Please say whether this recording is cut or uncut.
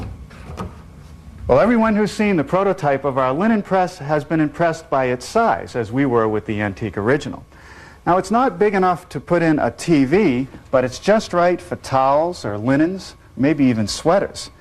uncut